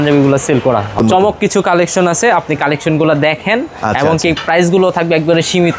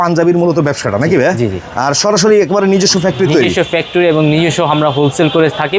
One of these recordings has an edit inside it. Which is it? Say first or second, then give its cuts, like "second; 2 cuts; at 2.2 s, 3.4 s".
first; 1 cut; at 1.0 s